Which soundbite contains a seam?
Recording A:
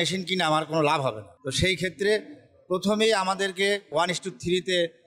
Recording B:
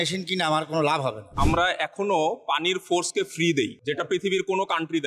B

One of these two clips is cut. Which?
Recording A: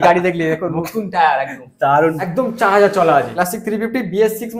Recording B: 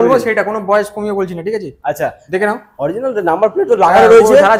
A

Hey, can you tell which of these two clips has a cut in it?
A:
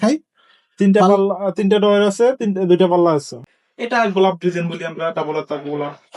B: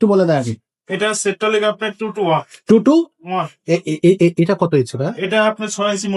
A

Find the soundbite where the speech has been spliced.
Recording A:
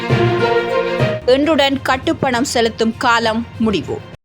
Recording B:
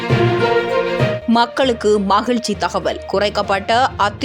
B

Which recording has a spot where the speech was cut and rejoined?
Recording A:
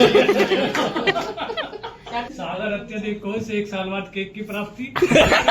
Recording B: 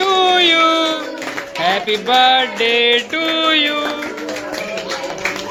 A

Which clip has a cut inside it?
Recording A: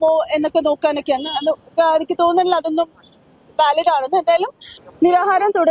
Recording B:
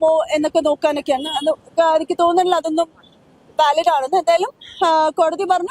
A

